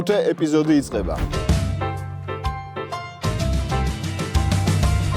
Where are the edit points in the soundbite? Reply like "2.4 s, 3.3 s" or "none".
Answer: 1.2 s

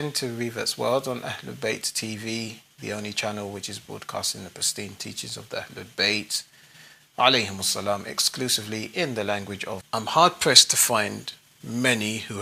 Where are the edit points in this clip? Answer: none

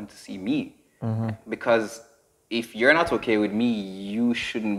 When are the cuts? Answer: none

